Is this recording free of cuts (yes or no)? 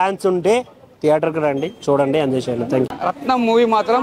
no